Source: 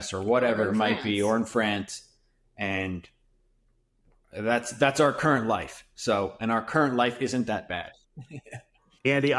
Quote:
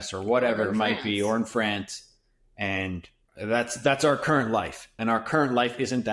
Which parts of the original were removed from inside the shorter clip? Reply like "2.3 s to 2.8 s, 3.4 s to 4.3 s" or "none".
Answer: 3.2 s to 4.1 s, 5.9 s to 6.3 s